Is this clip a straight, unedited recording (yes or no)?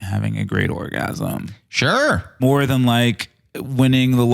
no